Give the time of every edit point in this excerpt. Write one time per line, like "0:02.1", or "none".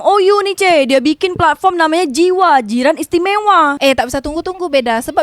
0:03.8